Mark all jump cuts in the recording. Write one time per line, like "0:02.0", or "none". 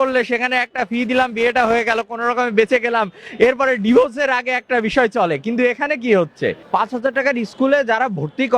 0:06.6